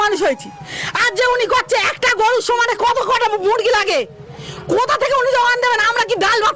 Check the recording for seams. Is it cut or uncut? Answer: uncut